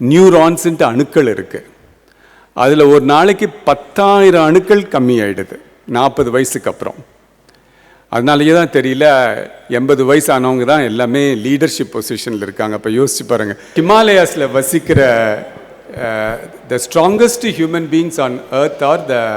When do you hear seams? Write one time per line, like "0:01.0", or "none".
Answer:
0:13.7